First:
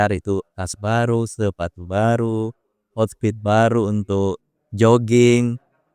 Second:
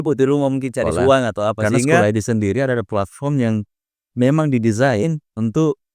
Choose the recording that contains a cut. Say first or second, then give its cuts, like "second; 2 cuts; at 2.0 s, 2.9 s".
second; 1 cut; at 2.0 s